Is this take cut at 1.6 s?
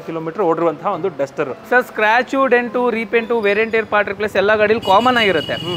yes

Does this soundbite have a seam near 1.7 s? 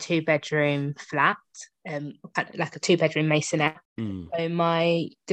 no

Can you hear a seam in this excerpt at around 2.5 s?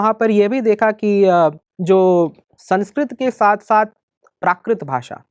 yes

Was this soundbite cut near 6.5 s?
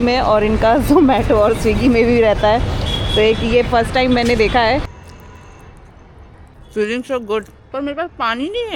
yes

